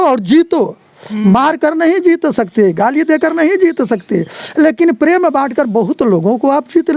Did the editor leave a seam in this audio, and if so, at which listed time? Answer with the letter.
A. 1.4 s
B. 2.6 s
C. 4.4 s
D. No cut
D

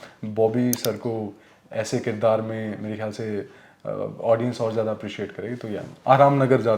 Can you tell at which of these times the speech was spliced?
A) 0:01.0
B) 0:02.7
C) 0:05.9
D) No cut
C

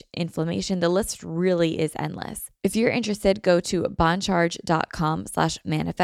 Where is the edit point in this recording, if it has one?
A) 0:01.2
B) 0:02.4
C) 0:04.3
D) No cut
B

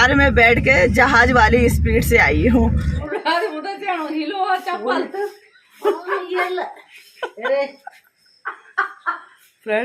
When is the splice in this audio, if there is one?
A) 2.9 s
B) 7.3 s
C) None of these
A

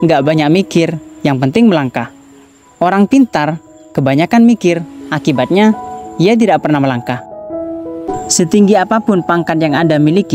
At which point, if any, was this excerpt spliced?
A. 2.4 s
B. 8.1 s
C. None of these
B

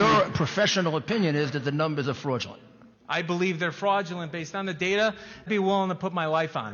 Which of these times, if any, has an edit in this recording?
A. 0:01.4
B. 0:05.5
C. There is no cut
B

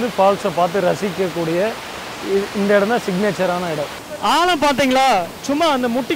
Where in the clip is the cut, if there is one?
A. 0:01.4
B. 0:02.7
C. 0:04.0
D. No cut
C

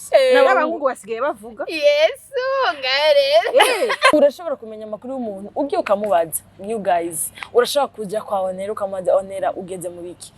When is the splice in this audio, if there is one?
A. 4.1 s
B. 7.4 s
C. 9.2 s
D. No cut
A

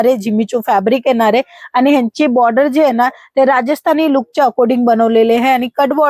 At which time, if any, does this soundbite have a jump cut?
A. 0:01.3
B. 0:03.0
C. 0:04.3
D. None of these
D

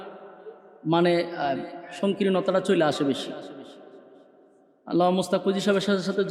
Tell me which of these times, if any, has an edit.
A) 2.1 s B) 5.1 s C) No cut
C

